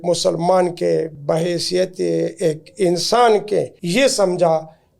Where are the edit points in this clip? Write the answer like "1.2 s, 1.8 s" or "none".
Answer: 1.2 s, 3.8 s